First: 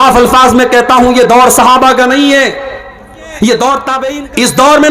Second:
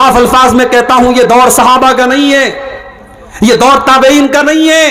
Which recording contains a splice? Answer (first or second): first